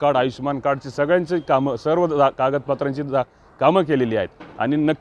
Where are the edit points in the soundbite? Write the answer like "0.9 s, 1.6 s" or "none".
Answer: none